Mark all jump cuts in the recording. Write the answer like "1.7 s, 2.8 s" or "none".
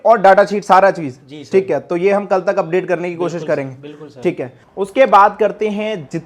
4.6 s